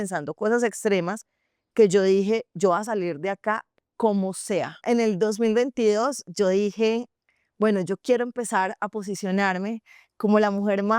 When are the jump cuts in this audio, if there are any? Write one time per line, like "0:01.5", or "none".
0:04.8